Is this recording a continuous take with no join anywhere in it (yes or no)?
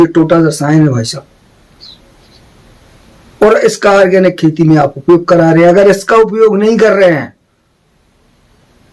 yes